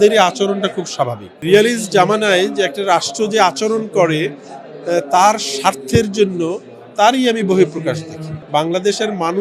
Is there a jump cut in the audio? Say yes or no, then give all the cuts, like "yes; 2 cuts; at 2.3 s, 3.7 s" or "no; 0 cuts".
yes; 2 cuts; at 1.4 s, 8.3 s